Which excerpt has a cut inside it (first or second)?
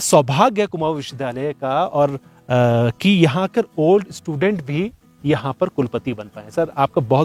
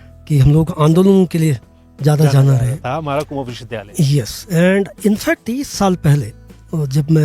second